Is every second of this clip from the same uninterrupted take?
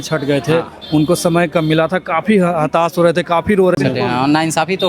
no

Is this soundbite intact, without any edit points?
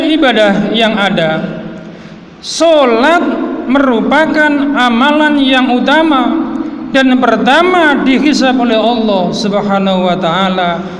yes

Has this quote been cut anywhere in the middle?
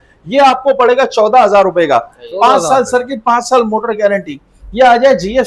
no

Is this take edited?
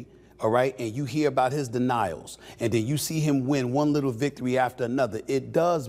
no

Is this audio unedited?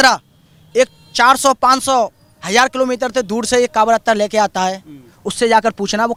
yes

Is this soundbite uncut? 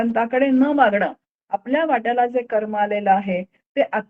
yes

